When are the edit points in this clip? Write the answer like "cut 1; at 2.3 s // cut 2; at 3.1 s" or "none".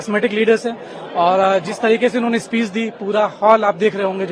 none